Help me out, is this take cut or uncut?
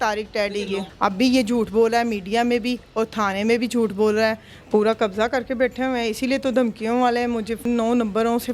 cut